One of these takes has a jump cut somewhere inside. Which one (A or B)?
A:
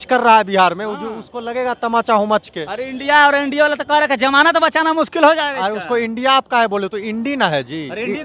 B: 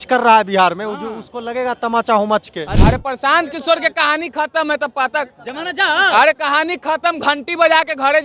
B